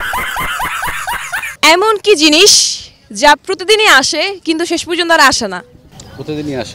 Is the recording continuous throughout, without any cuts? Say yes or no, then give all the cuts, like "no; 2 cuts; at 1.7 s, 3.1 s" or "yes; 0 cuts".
no; 2 cuts; at 1.4 s, 5.7 s